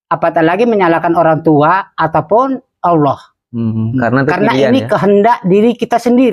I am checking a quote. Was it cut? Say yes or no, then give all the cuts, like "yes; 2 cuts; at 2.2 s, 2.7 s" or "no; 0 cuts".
no; 0 cuts